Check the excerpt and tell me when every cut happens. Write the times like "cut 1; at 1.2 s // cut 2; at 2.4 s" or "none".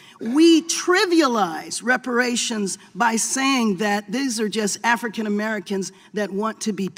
none